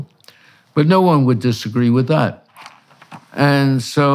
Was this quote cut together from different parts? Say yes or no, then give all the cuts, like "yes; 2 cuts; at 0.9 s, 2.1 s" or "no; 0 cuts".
no; 0 cuts